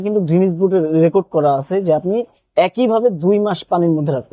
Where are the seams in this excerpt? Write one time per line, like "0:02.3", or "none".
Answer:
none